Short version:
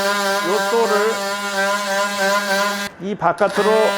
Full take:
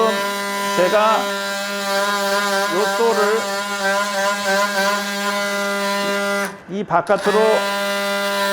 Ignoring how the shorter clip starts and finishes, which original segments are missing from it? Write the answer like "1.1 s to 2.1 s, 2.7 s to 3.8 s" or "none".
5.1 s to 6.6 s